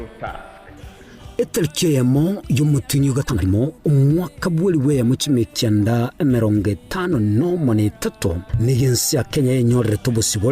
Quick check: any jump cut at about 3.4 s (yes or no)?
yes